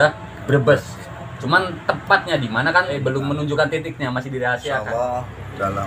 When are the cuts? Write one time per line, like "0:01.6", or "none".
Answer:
0:02.9
0:04.8